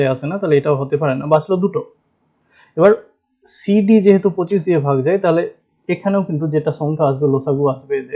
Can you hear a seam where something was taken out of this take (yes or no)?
no